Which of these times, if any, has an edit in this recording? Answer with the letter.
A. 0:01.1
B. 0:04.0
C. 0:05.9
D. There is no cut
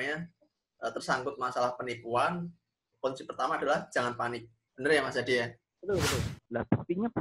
C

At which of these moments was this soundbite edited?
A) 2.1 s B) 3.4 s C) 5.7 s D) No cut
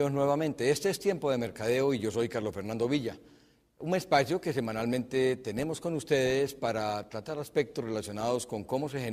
D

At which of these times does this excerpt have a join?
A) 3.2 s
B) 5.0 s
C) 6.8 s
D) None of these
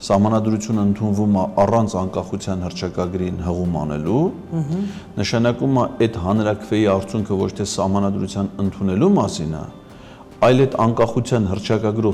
D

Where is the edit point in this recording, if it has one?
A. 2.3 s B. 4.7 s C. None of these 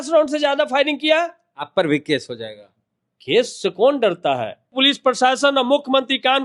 B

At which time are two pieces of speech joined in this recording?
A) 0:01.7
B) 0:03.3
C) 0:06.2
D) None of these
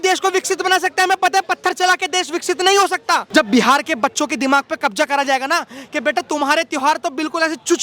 B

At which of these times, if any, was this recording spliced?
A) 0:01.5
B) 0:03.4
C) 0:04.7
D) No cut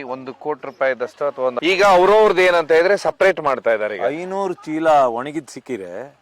A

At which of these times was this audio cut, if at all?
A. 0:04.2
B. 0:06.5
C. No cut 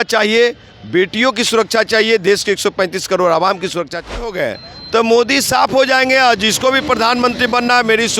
A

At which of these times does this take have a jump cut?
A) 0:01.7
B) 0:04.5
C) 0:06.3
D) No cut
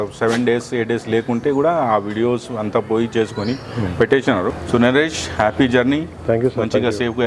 B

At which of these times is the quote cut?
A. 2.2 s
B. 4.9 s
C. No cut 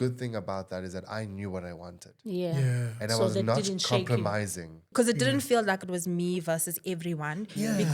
B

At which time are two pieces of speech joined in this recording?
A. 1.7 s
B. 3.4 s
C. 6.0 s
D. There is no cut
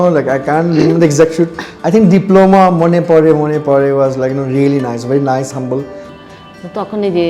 C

